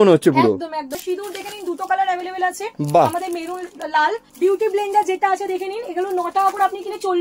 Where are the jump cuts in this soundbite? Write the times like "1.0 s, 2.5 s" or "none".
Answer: 0.9 s, 4.3 s